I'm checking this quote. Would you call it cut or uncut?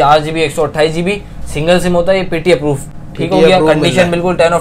uncut